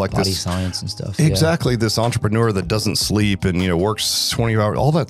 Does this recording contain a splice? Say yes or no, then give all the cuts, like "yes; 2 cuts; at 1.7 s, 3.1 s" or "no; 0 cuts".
no; 0 cuts